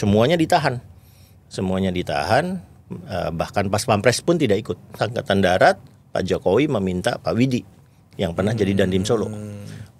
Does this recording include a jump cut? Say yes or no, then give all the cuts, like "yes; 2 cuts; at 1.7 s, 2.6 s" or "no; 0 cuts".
yes; 1 cut; at 5.0 s